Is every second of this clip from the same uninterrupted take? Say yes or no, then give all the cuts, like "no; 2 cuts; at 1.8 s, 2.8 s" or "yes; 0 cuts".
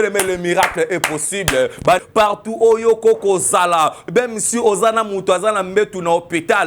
no; 1 cut; at 2.0 s